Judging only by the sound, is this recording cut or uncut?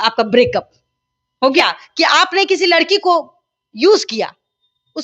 cut